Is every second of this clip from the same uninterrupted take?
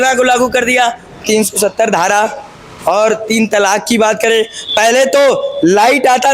yes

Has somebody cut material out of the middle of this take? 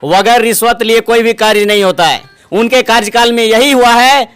yes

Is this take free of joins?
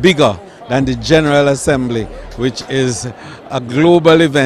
yes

